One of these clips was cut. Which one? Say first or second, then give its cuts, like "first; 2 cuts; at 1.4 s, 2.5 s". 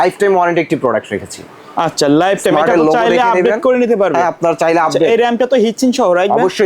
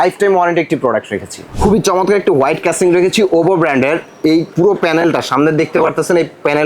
second; 1 cut; at 1.6 s